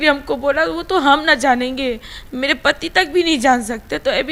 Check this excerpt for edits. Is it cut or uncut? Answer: uncut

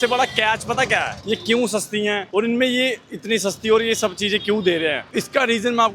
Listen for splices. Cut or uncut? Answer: uncut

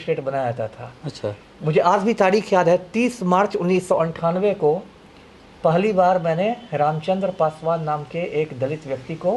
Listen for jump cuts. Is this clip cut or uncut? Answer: uncut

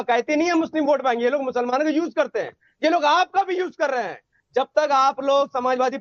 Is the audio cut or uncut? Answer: uncut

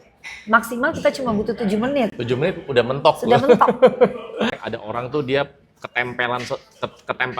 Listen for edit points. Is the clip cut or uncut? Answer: cut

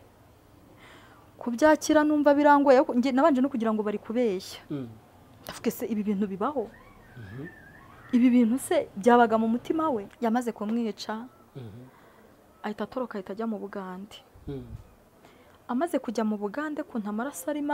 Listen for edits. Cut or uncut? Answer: cut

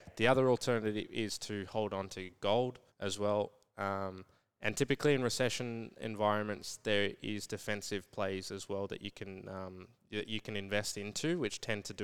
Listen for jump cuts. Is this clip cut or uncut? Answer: cut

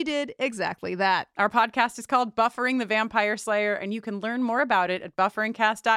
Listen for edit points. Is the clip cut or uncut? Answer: cut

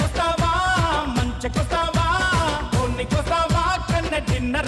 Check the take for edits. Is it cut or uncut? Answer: uncut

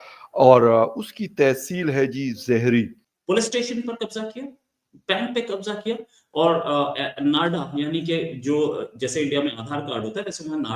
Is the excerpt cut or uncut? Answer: cut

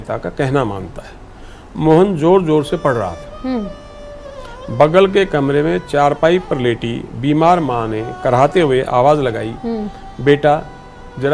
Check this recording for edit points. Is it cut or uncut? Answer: uncut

